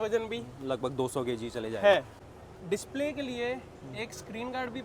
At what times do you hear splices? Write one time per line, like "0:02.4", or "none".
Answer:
0:02.2